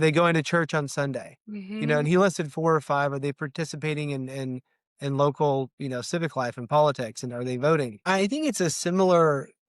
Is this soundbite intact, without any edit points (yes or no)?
no